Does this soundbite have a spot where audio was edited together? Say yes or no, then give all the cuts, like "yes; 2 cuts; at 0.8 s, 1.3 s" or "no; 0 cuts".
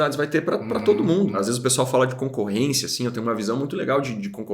yes; 1 cut; at 1.4 s